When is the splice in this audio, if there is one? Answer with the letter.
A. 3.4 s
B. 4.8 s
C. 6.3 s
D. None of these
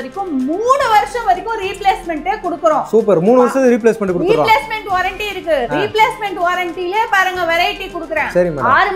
D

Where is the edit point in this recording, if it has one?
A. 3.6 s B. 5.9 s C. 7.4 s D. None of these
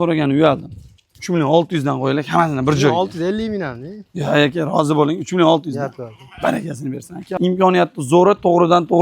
C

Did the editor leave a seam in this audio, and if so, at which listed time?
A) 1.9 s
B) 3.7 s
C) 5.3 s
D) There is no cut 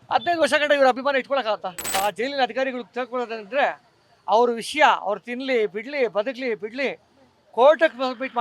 A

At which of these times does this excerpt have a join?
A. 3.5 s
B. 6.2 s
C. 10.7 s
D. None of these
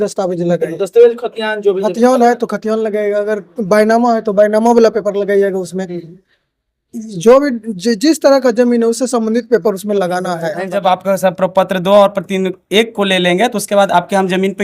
C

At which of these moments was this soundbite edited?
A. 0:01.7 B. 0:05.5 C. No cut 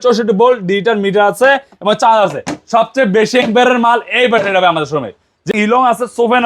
B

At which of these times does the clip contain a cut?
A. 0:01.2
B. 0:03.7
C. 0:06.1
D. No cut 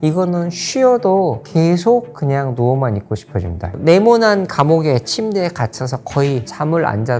B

